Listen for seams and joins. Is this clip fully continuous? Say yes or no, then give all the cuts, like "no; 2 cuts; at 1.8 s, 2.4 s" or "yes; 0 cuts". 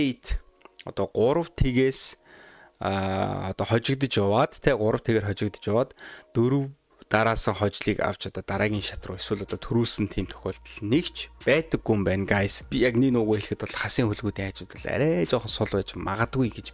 no; 1 cut; at 12.6 s